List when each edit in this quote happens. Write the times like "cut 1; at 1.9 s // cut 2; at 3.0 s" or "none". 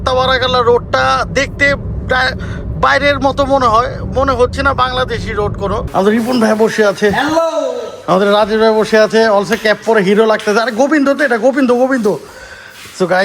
cut 1; at 5.8 s // cut 2; at 12.1 s

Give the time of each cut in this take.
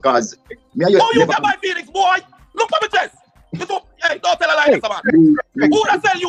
none

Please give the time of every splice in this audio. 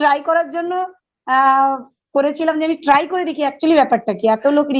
none

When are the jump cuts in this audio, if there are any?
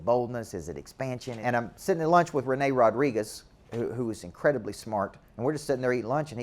cut 1; at 1.4 s // cut 2; at 5.2 s

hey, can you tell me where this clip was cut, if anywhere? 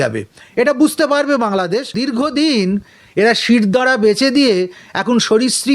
cut 1; at 2.0 s

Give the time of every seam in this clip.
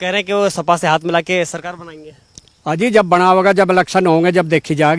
none

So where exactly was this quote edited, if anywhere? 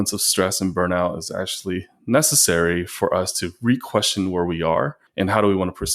cut 1; at 5.0 s

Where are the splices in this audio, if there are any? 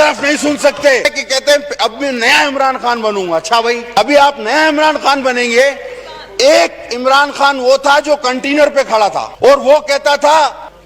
cut 1; at 1.1 s

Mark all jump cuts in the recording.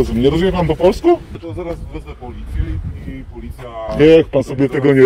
cut 1; at 1.4 s

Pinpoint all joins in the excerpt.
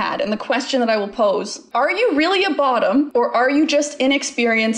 cut 1; at 1.6 s // cut 2; at 3.1 s

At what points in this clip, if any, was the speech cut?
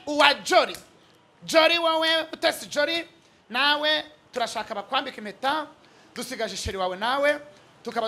none

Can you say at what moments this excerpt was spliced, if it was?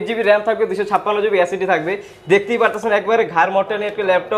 none

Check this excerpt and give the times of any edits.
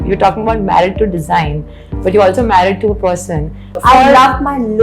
cut 1; at 3.7 s

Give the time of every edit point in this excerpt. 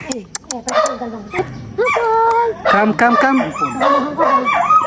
cut 1; at 1.4 s

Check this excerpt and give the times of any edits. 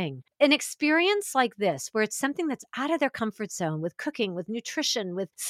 none

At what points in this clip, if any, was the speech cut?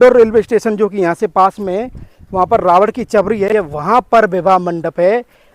cut 1; at 3.5 s

